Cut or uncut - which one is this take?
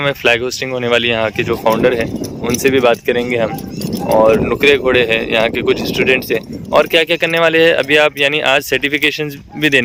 uncut